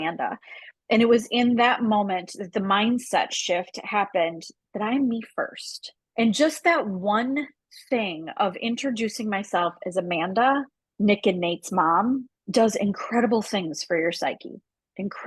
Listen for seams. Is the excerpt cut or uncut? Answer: uncut